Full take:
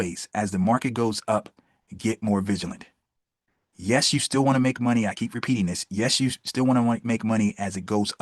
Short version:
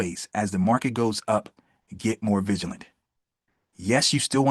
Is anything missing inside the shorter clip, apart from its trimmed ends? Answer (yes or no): no